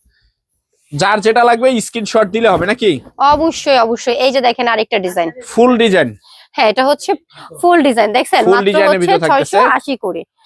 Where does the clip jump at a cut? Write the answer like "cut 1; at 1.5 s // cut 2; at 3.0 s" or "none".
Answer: none